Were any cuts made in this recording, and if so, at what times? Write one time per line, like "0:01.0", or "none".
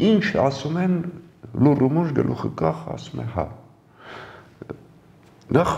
none